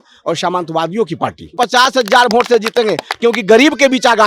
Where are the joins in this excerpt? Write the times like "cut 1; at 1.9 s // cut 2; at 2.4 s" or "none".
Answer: cut 1; at 1.5 s

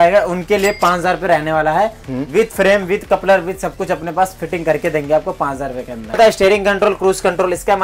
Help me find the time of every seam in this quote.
cut 1; at 6.2 s

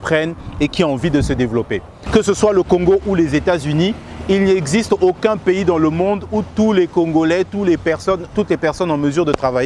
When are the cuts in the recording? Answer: cut 1; at 2.0 s

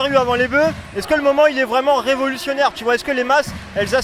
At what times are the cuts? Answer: none

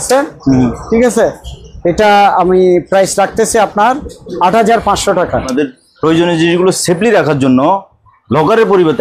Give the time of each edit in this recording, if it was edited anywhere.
cut 1; at 5.5 s

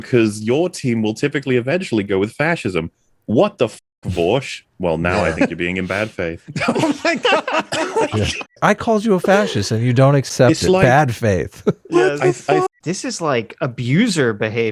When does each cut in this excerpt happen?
cut 1; at 8.6 s // cut 2; at 10.3 s // cut 3; at 12.7 s

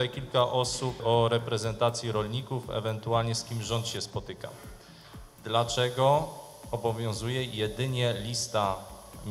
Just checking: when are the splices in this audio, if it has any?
cut 1; at 1.0 s

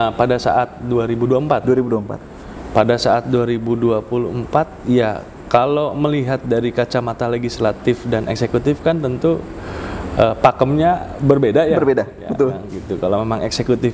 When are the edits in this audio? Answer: none

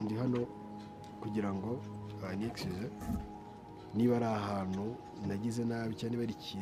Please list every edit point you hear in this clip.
none

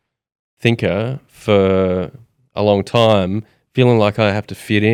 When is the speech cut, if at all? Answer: none

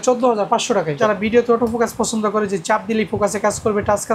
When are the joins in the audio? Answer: cut 1; at 1.0 s

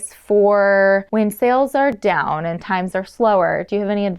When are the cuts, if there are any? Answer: cut 1; at 1.1 s

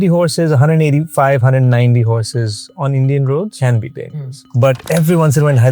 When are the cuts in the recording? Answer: cut 1; at 3.8 s

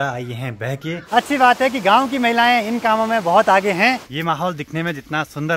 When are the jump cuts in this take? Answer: cut 1; at 1.0 s // cut 2; at 4.1 s

